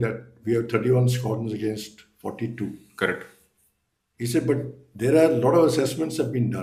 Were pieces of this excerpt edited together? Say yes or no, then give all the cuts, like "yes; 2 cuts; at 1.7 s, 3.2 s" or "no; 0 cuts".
no; 0 cuts